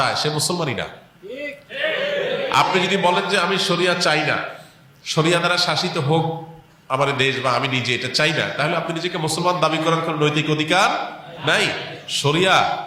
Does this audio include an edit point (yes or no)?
no